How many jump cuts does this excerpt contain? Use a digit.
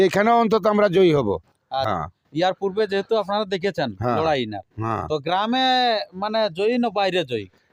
1